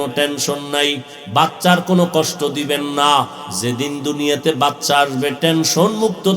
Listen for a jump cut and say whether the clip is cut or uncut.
cut